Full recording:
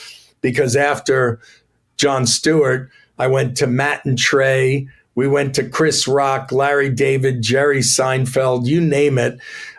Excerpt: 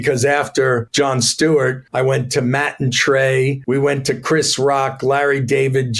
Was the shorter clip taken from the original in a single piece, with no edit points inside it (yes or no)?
no